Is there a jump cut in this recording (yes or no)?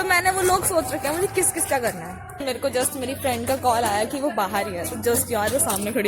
yes